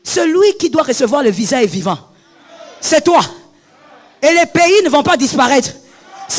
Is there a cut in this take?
no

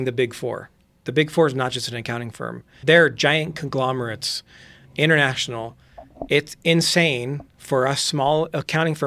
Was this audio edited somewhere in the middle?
yes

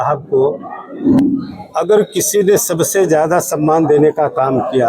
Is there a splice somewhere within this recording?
yes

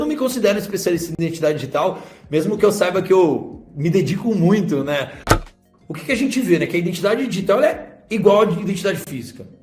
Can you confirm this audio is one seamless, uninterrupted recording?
no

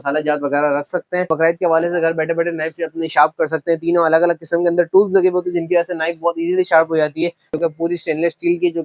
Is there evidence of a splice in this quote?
yes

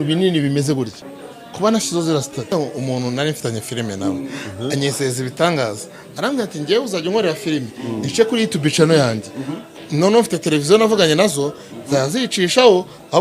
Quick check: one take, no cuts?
no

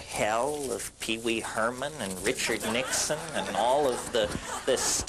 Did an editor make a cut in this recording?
yes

